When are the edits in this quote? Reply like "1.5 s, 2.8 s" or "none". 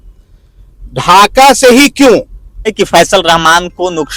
2.7 s

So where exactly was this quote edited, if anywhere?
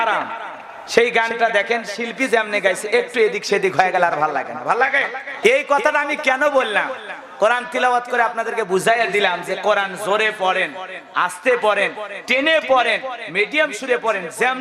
5.2 s

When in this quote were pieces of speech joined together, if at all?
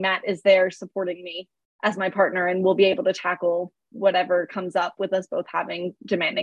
none

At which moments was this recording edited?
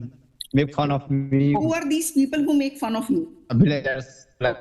1.5 s, 3.5 s

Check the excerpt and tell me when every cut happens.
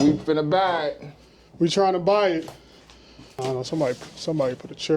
3.0 s

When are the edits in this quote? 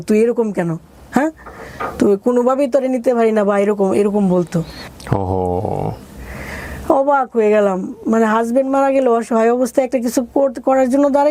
none

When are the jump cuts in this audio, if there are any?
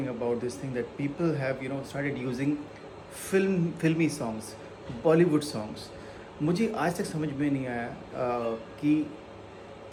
none

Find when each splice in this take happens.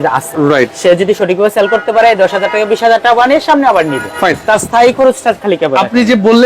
none

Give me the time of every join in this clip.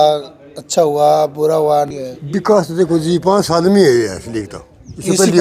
1.9 s

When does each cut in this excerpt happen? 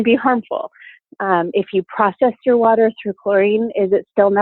1.0 s

